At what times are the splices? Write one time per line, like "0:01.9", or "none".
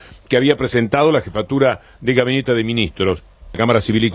none